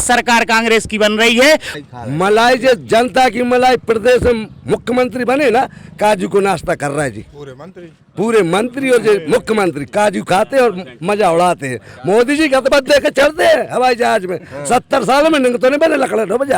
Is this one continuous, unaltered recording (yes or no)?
no